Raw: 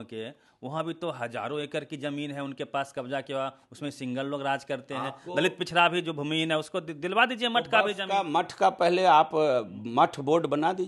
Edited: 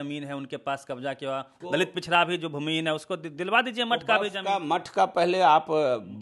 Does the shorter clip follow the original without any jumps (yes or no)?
no